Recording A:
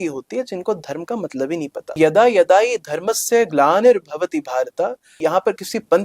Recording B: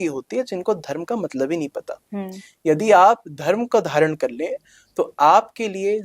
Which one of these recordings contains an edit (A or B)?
A